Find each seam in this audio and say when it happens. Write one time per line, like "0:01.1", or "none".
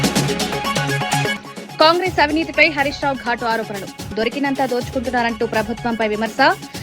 0:01.3